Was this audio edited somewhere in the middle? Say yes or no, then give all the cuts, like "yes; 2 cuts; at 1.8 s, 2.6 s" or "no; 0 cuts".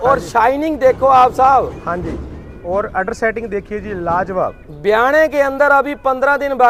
no; 0 cuts